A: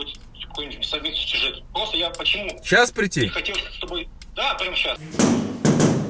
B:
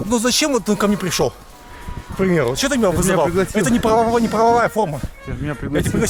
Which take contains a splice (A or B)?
A